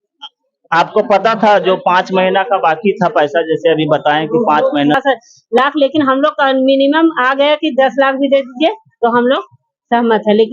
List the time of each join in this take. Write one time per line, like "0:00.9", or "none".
0:05.0